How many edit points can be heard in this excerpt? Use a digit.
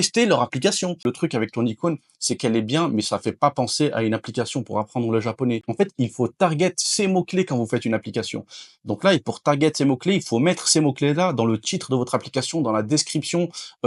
2